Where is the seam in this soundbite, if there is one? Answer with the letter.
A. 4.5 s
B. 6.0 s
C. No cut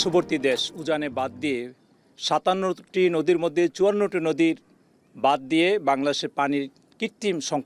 C